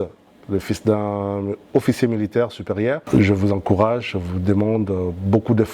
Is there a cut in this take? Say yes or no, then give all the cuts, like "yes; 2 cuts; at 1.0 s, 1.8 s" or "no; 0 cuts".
yes; 1 cut; at 3.0 s